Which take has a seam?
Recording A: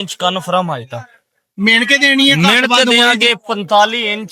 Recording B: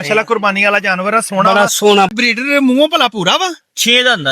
B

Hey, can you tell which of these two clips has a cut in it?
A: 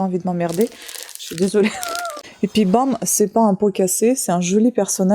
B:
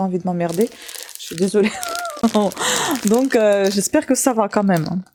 A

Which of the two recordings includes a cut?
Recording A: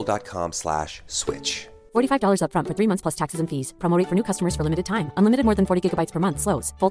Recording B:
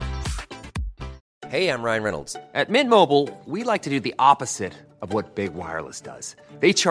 B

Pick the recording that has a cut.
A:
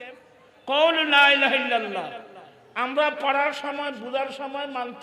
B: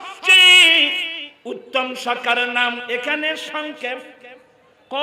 B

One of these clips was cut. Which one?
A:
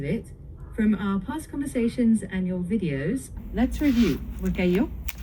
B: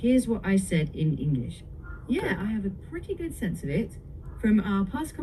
A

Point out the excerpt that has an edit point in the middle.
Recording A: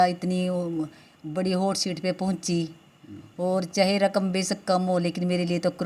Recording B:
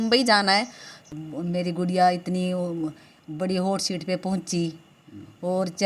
B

